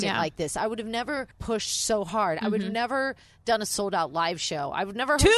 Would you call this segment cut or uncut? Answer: cut